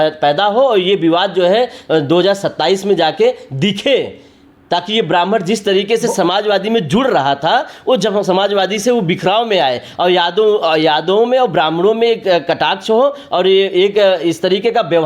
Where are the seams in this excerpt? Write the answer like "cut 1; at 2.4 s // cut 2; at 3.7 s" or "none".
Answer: none

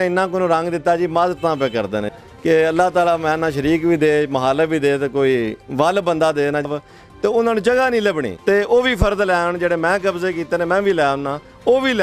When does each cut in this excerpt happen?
cut 1; at 2.1 s // cut 2; at 6.7 s // cut 3; at 8.3 s

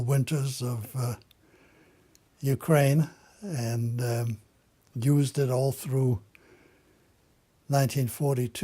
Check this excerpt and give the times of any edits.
cut 1; at 7.1 s

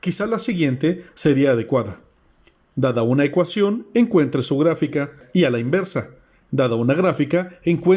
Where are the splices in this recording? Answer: cut 1; at 5.2 s

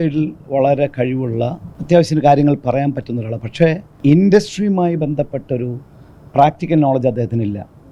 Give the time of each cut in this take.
cut 1; at 1.7 s // cut 2; at 4.0 s

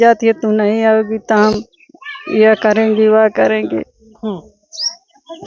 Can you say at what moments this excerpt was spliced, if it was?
none

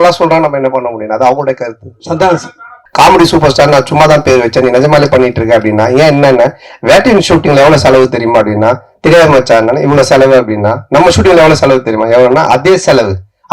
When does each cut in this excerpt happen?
cut 1; at 2.8 s

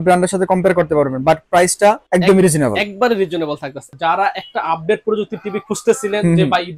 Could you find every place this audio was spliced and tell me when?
cut 1; at 2.0 s // cut 2; at 3.9 s

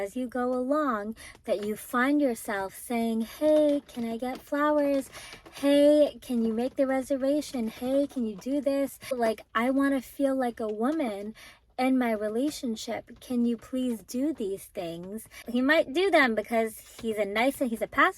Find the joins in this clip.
cut 1; at 9.2 s // cut 2; at 15.4 s

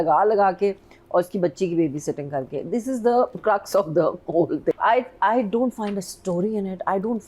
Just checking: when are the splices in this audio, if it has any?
cut 1; at 4.8 s

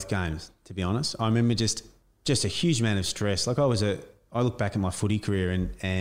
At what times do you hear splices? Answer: none

